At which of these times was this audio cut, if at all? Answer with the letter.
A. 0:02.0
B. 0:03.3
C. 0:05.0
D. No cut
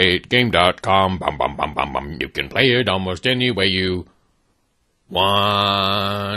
A